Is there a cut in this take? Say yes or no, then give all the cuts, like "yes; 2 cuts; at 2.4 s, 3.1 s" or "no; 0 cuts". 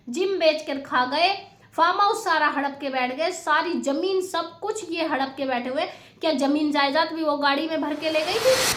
no; 0 cuts